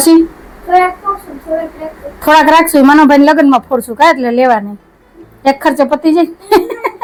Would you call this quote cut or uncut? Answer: uncut